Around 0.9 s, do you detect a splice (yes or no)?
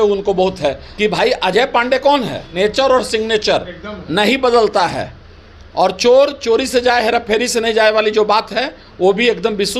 yes